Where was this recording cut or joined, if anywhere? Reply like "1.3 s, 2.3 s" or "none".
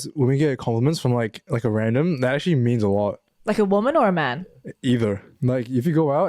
5.3 s